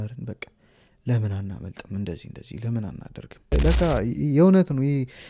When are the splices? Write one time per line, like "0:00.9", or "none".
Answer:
0:03.5